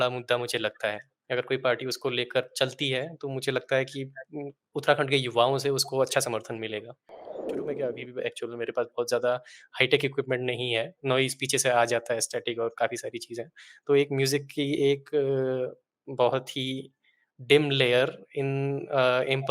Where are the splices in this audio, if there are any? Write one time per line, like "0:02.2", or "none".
0:07.5